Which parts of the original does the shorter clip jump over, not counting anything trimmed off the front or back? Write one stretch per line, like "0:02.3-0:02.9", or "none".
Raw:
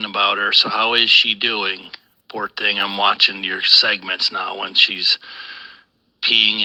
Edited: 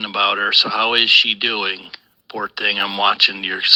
none